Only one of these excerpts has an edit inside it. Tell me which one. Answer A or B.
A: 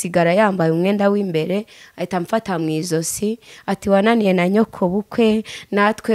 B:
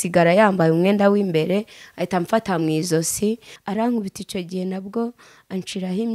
B